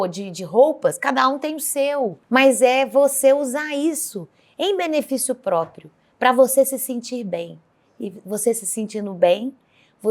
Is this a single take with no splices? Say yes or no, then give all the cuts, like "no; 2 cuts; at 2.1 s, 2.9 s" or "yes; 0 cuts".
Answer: no; 1 cut; at 2.2 s